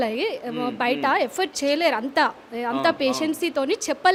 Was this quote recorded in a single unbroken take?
yes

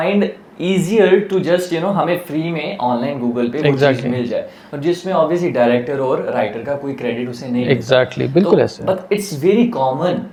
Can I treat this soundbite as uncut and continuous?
yes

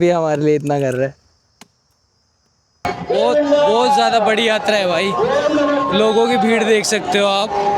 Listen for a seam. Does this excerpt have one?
yes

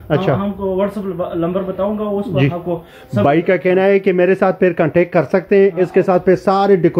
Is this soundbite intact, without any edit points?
yes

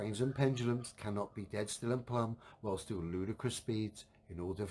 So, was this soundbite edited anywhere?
no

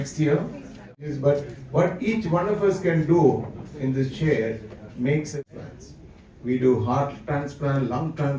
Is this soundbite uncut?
no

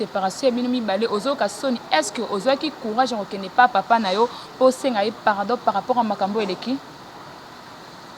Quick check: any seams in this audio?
no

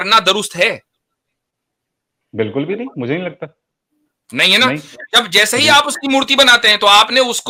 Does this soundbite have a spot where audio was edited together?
no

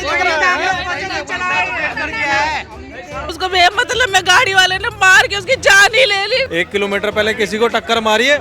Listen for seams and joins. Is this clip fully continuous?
no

